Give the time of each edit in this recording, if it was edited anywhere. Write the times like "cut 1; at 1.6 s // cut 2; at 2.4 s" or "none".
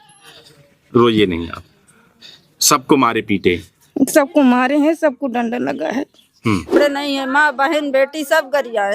cut 1; at 6.8 s